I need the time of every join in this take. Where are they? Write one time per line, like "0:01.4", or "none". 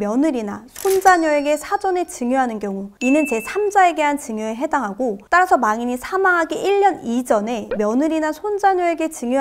none

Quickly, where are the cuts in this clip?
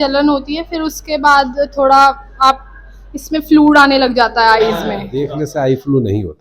0:05.3

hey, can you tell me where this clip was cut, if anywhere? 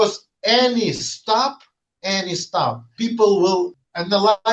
0:02.9
0:03.7

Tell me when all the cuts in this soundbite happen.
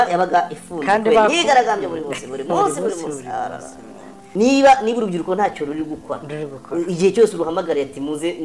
0:04.2

